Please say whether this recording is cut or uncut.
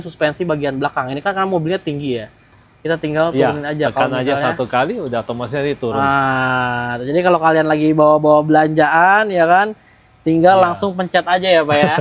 uncut